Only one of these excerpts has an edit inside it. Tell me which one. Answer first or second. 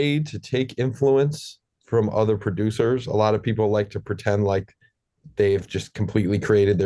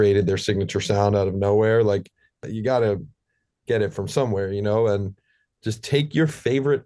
second